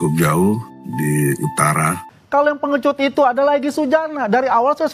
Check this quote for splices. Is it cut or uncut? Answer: cut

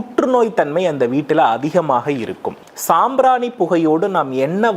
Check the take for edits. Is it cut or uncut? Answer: cut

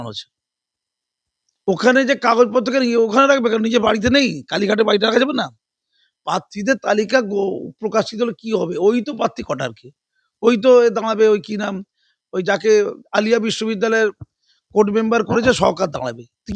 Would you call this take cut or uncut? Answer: uncut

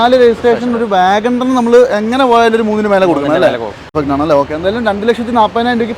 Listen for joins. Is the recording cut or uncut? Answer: cut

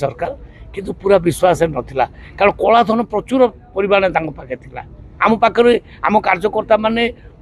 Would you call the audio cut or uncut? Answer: uncut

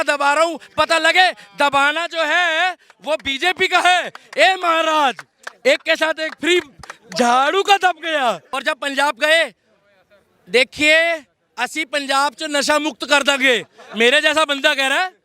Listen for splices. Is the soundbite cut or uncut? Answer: cut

